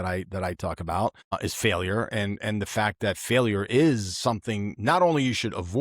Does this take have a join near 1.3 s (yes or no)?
yes